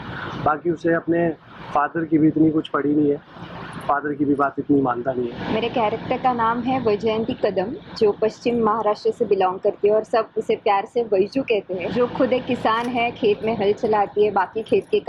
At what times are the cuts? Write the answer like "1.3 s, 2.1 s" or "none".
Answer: 5.4 s, 11.9 s